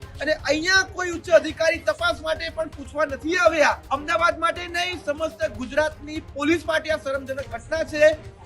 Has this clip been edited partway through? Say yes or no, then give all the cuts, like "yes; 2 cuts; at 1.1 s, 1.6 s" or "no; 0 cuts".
yes; 1 cut; at 3.8 s